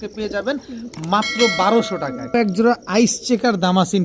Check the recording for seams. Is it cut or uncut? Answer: cut